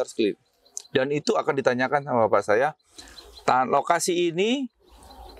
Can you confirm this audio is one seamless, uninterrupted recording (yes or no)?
yes